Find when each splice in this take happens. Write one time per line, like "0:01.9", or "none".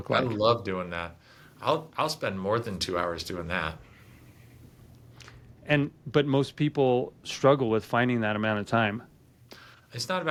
none